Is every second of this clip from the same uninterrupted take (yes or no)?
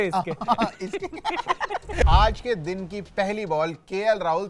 no